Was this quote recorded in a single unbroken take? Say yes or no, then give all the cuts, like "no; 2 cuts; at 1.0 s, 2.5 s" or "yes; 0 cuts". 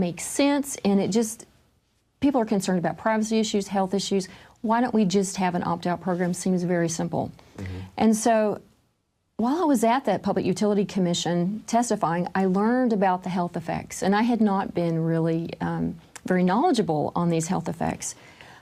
yes; 0 cuts